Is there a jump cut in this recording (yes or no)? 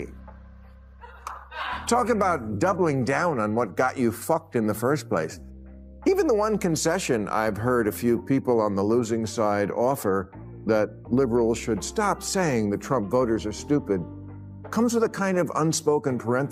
no